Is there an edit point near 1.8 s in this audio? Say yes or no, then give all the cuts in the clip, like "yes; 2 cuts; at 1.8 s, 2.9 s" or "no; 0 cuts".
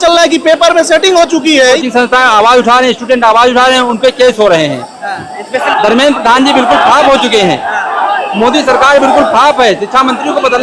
yes; 2 cuts; at 1.8 s, 5.6 s